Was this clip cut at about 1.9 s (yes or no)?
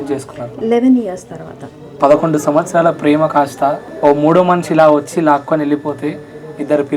yes